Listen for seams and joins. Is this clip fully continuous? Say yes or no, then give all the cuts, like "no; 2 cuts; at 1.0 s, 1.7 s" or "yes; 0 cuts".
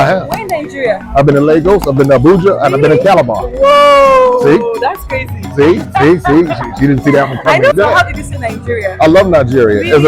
no; 1 cut; at 7.7 s